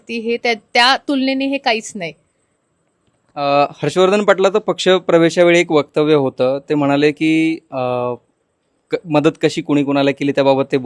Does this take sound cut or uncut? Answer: uncut